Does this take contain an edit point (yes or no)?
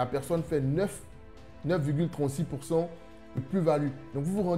yes